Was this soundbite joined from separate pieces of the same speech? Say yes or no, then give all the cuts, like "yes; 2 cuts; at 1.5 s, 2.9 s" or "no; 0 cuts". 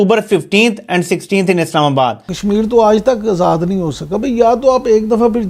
yes; 1 cut; at 2.3 s